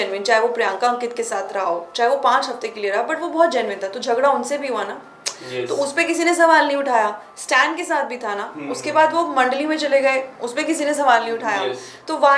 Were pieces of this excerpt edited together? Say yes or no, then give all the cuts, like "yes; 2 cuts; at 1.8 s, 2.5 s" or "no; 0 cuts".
no; 0 cuts